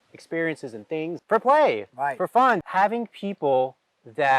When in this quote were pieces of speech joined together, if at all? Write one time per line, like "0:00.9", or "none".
0:01.2
0:02.7